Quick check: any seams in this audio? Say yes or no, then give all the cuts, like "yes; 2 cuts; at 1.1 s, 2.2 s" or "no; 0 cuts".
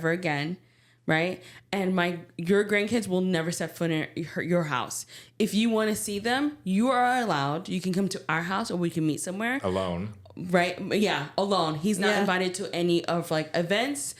no; 0 cuts